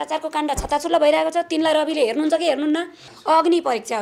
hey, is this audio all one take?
no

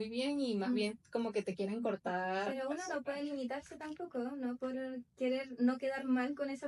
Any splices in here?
no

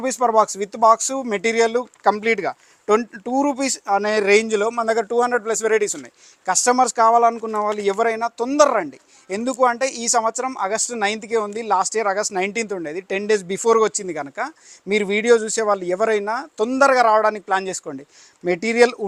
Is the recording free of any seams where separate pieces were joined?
yes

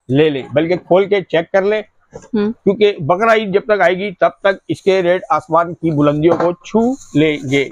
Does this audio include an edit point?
no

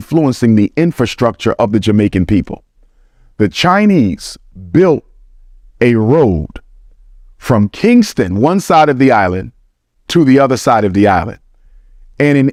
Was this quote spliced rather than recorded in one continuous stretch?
no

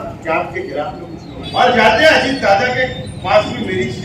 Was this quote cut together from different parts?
yes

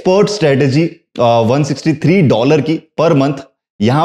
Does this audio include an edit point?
no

